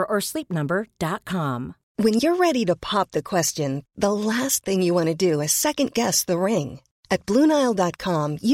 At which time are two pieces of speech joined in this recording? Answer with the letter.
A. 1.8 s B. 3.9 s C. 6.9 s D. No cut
A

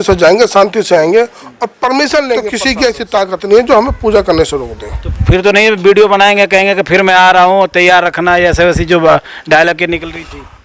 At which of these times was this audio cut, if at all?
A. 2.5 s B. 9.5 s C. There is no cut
A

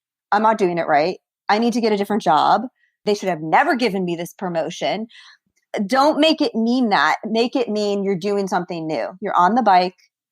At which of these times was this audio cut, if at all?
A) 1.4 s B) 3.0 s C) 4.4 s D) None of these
B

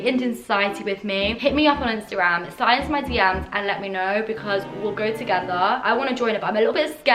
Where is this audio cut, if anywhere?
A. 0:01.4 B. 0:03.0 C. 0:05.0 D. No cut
A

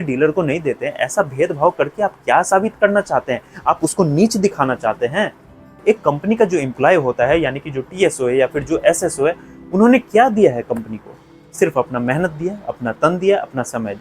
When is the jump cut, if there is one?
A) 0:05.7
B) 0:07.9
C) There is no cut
A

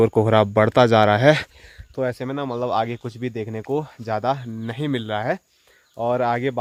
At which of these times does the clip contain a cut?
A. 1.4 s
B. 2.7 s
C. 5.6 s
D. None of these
D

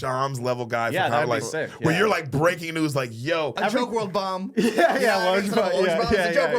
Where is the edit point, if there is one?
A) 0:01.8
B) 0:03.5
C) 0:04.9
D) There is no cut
B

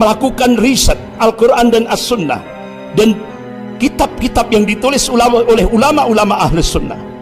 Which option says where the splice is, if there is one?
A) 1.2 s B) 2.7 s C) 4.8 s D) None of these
A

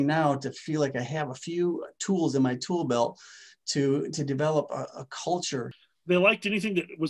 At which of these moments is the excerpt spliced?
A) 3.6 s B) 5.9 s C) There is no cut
B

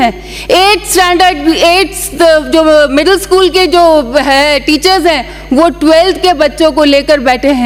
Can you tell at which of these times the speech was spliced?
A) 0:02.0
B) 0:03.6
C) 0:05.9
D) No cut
D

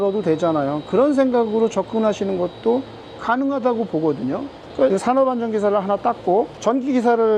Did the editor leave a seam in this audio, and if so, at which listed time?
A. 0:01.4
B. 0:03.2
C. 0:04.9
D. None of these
C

